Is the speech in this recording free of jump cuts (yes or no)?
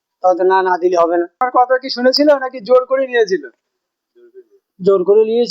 no